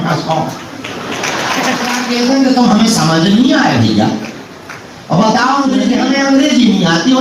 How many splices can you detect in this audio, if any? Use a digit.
2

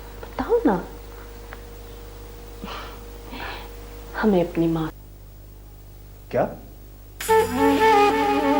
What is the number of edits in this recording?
1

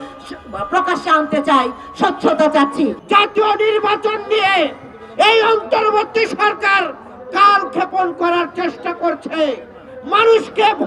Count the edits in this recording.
1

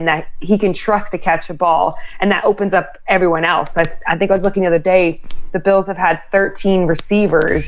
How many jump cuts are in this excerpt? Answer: 0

